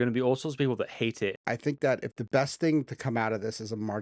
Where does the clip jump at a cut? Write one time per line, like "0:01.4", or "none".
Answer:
0:01.4